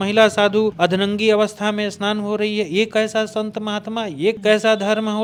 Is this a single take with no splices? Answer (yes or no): yes